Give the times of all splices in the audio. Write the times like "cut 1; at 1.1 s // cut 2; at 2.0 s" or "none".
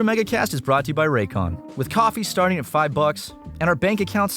cut 1; at 1.6 s // cut 2; at 3.3 s